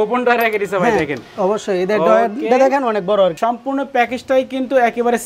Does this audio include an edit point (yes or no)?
yes